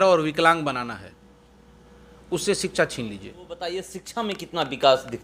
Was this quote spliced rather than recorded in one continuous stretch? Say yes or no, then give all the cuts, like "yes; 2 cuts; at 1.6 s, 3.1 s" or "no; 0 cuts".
yes; 1 cut; at 3.6 s